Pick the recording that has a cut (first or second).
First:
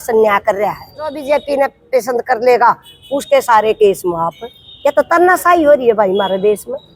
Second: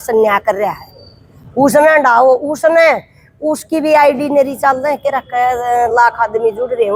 first